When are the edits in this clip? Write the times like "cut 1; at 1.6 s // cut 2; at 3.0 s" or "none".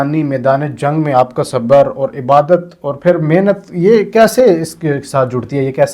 none